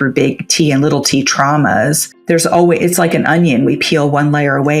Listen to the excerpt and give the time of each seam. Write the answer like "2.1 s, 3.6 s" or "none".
2.1 s